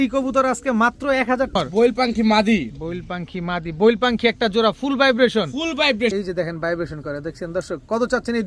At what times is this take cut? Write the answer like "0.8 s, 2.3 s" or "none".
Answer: 1.6 s, 6.1 s